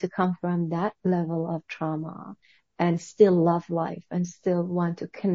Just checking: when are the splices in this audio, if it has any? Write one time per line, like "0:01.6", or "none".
none